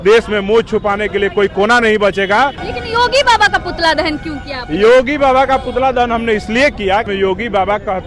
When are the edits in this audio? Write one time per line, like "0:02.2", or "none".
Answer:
0:02.6
0:07.1